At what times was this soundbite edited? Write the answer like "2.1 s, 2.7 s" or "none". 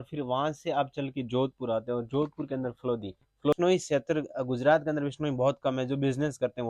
3.5 s